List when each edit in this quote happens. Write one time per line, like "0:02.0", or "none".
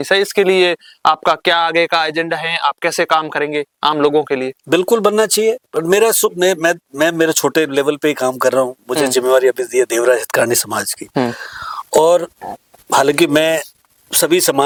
none